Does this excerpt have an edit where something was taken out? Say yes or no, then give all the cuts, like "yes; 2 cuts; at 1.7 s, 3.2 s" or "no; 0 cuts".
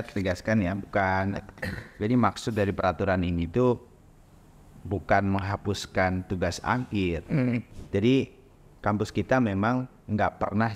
yes; 1 cut; at 7.8 s